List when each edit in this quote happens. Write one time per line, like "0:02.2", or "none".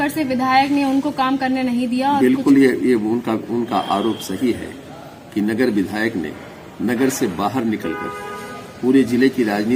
none